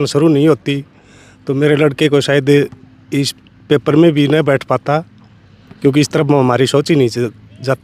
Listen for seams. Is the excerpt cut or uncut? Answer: uncut